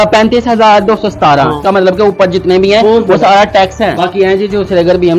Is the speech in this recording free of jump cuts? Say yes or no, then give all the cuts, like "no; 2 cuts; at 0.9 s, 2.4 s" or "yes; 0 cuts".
no; 2 cuts; at 1.6 s, 4.0 s